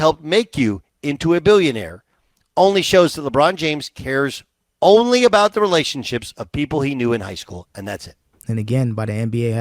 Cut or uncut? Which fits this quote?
cut